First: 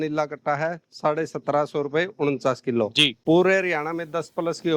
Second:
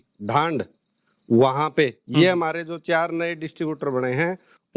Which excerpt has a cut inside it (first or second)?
first